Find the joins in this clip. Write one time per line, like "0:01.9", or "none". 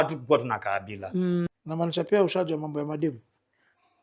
0:01.5